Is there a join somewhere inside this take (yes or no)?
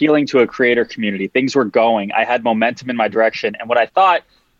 no